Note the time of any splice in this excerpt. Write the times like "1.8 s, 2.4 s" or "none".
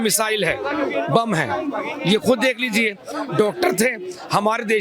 none